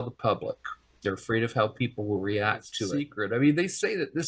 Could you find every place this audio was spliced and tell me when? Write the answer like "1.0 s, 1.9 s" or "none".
2.8 s